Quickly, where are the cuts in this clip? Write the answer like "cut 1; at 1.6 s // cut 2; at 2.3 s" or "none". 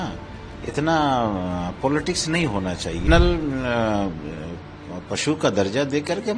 cut 1; at 3.0 s